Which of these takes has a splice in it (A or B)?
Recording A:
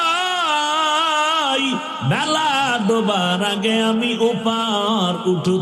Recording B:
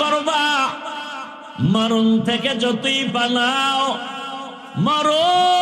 B